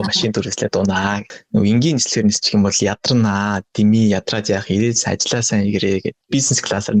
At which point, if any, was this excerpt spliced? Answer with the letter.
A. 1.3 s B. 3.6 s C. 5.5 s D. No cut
A